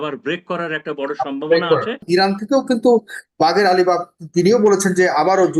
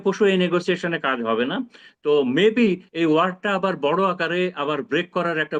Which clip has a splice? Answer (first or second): first